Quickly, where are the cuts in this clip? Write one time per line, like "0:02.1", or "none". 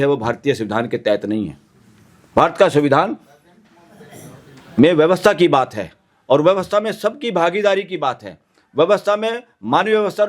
none